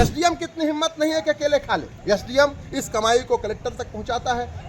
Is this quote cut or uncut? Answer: cut